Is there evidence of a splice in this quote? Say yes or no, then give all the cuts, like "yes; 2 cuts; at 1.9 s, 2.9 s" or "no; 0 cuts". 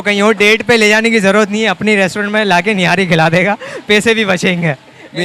no; 0 cuts